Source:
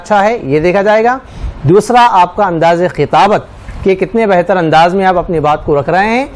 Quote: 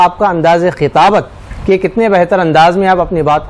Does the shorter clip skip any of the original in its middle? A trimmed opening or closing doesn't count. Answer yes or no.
no